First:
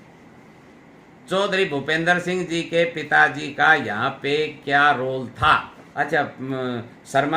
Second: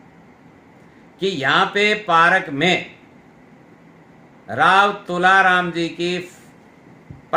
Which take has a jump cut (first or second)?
first